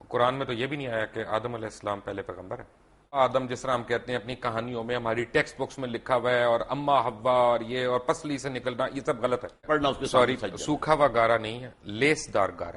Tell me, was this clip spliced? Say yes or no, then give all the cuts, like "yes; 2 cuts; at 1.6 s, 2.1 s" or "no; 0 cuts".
yes; 2 cuts; at 3.2 s, 9.7 s